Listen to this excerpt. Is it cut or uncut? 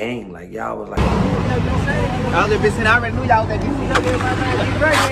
cut